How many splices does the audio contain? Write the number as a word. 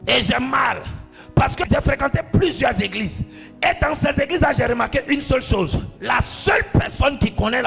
two